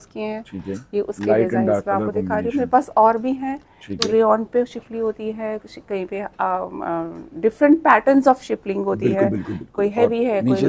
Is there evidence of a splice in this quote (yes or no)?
yes